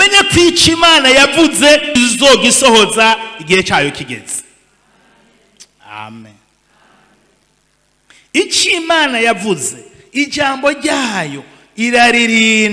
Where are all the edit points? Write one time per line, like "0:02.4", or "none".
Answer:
0:01.9
0:07.7